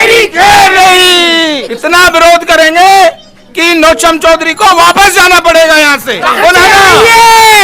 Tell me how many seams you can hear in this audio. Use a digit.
2